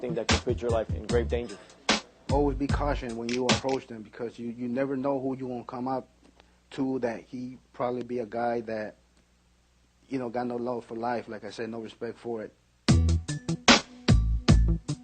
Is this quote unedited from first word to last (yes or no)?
no